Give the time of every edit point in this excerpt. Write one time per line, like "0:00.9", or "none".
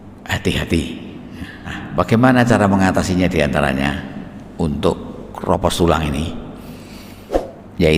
0:01.8

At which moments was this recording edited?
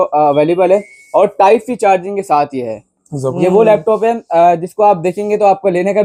0:03.3

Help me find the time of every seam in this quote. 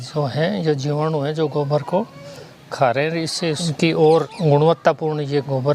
0:04.3

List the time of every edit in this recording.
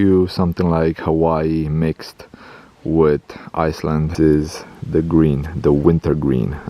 0:04.1

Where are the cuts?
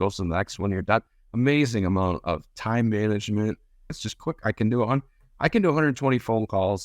0:04.0

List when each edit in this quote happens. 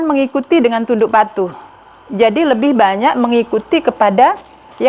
none

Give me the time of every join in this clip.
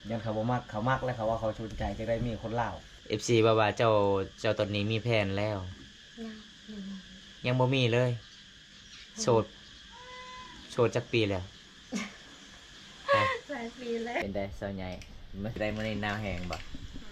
0:02.9
0:14.2
0:15.6

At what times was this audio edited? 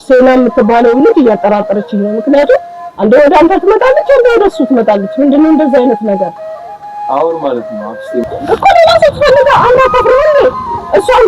0:08.3

